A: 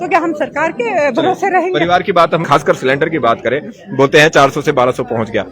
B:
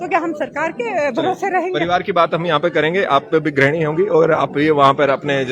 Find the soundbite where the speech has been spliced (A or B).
A